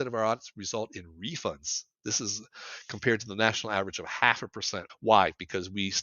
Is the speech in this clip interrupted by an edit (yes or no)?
yes